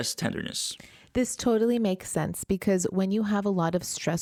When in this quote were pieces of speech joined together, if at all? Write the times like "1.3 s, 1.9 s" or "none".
none